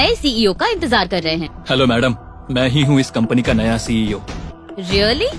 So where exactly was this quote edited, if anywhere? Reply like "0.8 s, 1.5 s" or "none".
1.5 s, 4.5 s